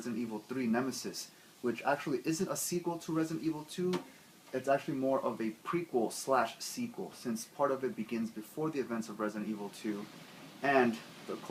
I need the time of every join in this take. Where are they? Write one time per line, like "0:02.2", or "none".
none